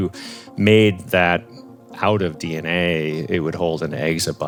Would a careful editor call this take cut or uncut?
uncut